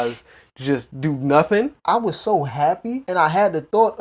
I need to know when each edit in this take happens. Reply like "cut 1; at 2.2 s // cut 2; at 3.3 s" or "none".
cut 1; at 1.8 s // cut 2; at 3.0 s

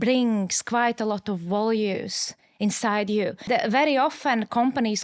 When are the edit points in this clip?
cut 1; at 3.5 s

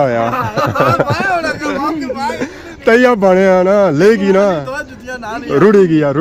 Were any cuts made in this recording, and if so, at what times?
none

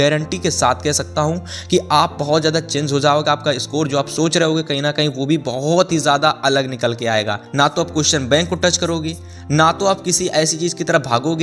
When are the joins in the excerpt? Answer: cut 1; at 7.4 s

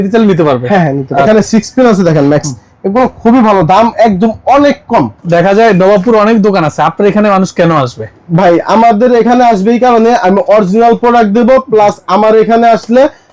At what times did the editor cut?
cut 1; at 1.2 s // cut 2; at 5.2 s

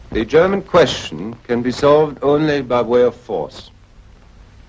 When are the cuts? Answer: cut 1; at 2.1 s

